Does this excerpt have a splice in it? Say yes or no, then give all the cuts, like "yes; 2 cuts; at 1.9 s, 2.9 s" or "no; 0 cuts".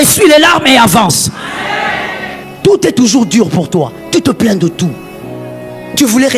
yes; 1 cut; at 2.4 s